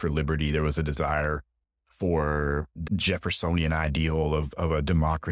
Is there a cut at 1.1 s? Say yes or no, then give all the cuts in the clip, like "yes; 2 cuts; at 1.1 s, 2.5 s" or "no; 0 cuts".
no; 1 cut; at 2.7 s